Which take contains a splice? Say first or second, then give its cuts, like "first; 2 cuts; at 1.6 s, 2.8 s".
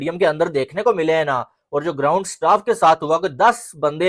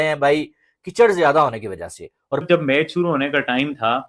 second; 1 cut; at 2.4 s